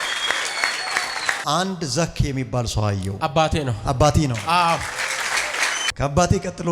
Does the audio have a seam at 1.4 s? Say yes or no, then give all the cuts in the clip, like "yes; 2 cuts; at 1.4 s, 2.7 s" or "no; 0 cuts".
yes; 2 cuts; at 1.4 s, 5.9 s